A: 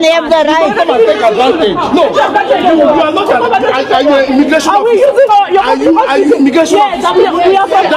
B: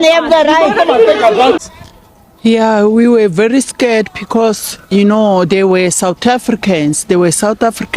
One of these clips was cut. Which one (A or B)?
B